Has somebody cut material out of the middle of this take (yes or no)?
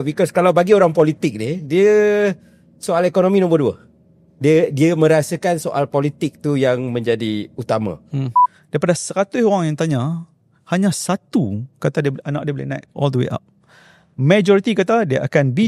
yes